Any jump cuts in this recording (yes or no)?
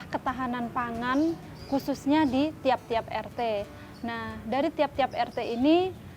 no